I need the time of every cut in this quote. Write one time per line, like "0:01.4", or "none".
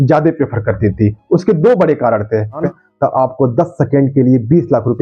0:02.6